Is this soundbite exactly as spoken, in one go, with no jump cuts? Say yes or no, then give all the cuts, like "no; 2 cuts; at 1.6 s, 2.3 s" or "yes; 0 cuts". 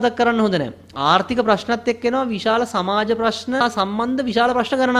no; 1 cut; at 3.6 s